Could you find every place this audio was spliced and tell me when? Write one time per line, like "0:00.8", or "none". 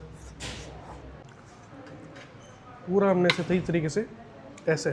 0:01.2